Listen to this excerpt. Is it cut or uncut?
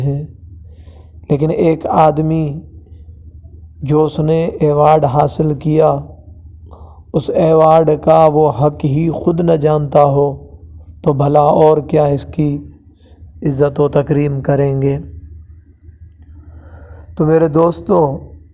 uncut